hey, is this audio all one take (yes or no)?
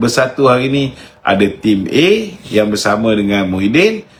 yes